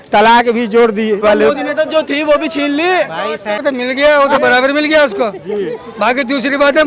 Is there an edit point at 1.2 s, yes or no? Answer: yes